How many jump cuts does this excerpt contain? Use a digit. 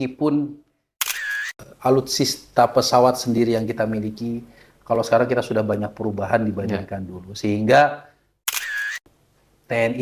2